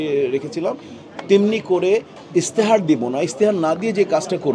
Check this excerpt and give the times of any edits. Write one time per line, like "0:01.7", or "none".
none